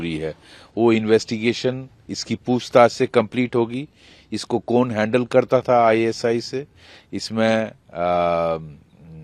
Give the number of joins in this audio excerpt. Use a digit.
0